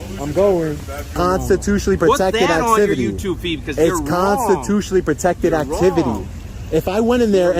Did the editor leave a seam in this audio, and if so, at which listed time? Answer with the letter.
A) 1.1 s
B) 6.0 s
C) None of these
A